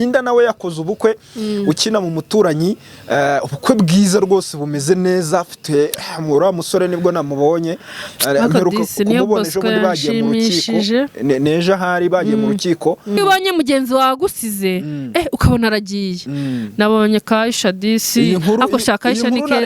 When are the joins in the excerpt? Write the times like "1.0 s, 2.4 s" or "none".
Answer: 13.2 s